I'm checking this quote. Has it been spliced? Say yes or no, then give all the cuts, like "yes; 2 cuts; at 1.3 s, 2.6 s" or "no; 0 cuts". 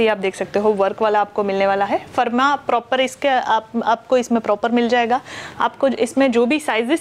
no; 0 cuts